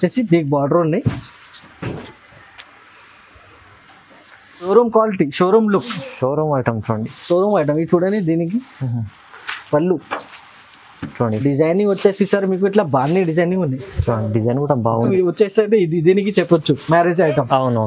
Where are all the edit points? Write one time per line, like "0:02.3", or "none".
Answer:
0:04.7
0:15.1